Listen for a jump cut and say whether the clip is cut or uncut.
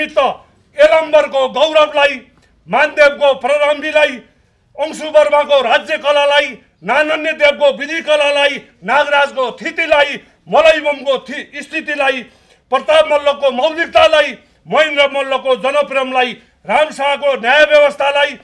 uncut